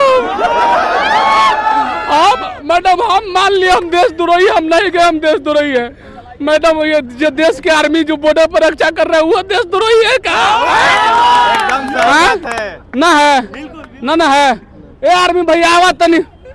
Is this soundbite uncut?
yes; 0 cuts

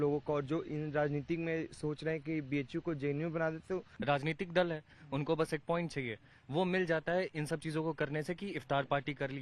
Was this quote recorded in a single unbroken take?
no; 1 cut; at 3.9 s

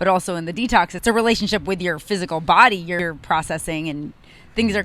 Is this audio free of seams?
no; 2 cuts; at 0.9 s, 3.0 s

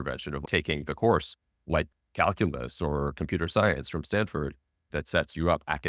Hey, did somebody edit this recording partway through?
yes; 1 cut; at 4.9 s

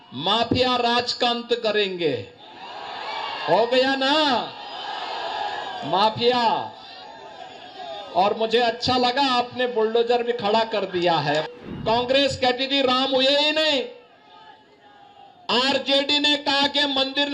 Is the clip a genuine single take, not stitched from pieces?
no; 1 cut; at 11.5 s

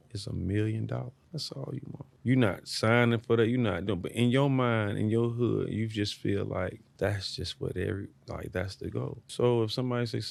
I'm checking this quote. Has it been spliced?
no; 0 cuts

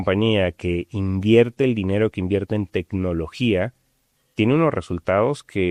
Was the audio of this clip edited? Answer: no; 0 cuts

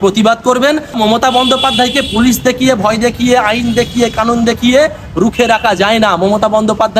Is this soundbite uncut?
no; 1 cut; at 1.0 s

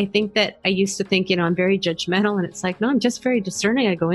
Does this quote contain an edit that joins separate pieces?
no; 0 cuts

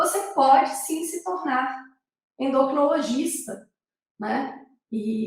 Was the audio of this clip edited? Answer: no; 0 cuts

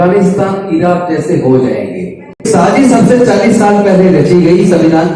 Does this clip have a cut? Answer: yes; 1 cut; at 2.5 s

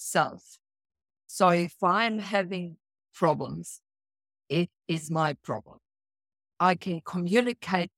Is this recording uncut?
no; 1 cut; at 6.5 s

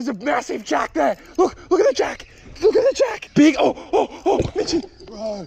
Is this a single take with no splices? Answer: no; 1 cut; at 3.2 s

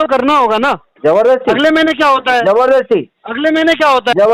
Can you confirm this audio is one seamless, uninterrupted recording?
yes; 0 cuts

